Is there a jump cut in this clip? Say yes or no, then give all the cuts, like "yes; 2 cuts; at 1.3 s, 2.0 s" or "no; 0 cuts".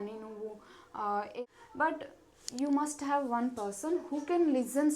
yes; 1 cut; at 1.3 s